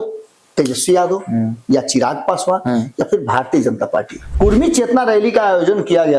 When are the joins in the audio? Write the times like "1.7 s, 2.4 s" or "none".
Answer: 4.2 s